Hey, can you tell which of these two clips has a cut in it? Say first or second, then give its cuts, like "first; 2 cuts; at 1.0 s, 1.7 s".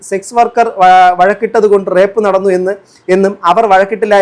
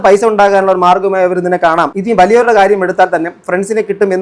second; 1 cut; at 1.9 s